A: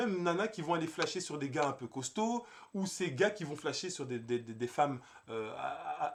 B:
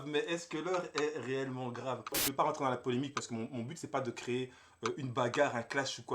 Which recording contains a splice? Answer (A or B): B